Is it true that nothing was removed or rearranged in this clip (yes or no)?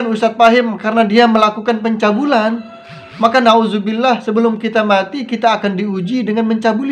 yes